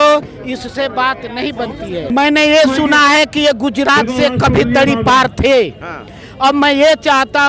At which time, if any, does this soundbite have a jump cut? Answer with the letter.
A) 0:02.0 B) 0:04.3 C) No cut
A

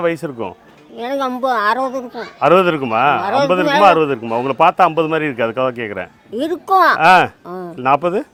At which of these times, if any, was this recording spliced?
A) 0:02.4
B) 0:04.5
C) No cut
C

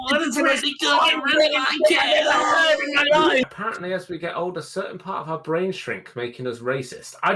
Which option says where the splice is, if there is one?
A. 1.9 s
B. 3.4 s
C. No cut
B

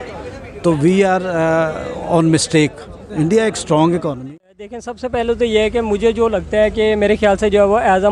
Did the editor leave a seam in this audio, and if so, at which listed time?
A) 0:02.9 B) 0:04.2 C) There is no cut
B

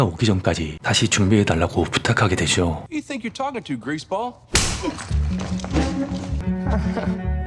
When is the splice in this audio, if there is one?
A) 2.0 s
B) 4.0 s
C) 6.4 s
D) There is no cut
C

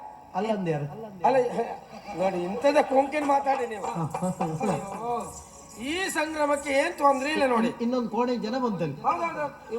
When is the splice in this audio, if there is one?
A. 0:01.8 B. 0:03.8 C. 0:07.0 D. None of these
B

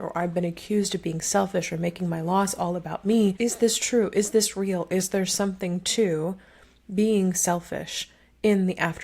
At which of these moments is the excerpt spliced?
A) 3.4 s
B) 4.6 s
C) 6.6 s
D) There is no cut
A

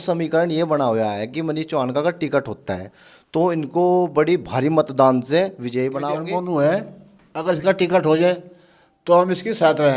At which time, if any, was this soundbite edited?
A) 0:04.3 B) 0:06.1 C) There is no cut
B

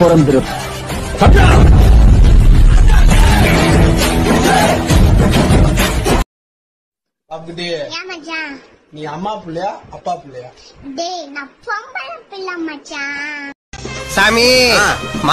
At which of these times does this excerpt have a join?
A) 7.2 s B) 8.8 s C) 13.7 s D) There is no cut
D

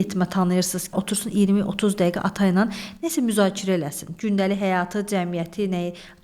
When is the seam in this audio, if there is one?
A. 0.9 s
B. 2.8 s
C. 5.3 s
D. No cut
A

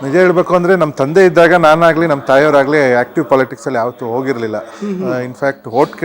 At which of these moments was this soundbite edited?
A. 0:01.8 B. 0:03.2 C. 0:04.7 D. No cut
D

